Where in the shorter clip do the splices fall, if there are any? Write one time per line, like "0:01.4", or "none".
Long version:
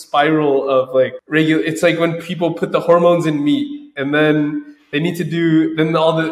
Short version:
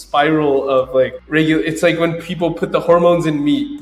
none